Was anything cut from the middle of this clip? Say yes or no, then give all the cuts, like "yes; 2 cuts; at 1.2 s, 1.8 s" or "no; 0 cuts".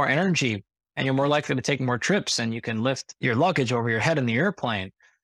no; 0 cuts